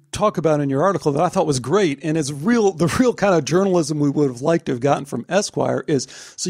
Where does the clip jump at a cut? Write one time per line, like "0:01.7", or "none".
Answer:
none